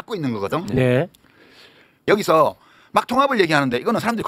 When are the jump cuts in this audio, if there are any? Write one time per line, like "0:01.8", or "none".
0:02.0